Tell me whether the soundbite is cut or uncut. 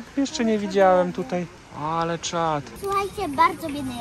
cut